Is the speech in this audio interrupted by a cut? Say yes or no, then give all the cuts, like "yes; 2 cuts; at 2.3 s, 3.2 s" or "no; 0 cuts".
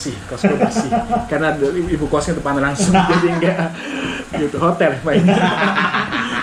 no; 0 cuts